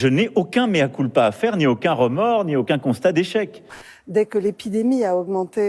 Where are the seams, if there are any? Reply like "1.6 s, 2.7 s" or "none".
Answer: 3.6 s